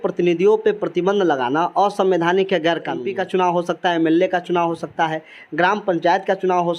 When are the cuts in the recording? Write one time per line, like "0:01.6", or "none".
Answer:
0:03.1